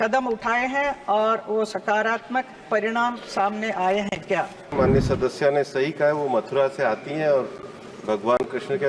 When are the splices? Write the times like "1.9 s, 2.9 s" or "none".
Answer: 4.7 s